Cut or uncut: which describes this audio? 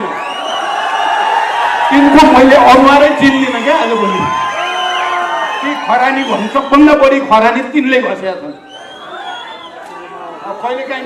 uncut